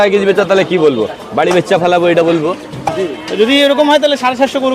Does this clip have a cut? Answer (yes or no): yes